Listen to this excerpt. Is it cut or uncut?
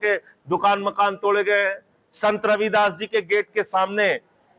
uncut